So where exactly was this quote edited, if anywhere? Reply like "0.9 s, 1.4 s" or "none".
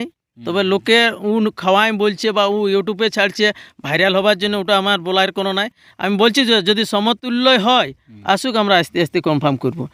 none